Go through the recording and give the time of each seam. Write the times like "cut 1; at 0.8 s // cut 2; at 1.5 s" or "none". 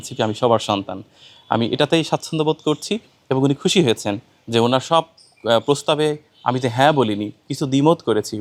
none